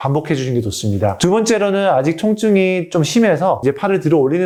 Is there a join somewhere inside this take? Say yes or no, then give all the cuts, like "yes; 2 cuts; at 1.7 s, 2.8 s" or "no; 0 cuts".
no; 0 cuts